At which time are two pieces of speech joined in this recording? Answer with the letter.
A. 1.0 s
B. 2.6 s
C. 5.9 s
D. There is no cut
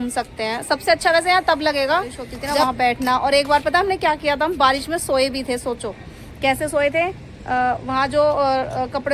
B